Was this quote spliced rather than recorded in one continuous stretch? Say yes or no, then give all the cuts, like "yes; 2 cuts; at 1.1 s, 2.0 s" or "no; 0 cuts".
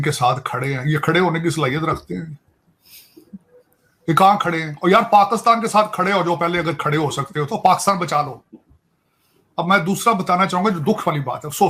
no; 0 cuts